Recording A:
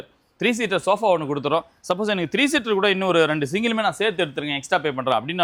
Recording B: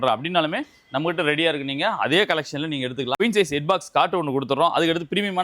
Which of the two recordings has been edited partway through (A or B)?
B